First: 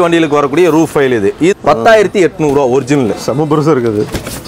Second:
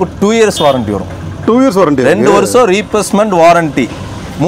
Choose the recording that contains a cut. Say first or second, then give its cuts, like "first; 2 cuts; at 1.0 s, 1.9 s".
first; 1 cut; at 1.5 s